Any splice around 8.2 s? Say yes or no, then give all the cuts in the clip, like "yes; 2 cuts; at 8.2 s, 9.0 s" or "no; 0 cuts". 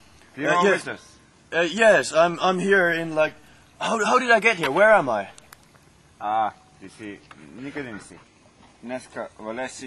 yes; 1 cut; at 8.2 s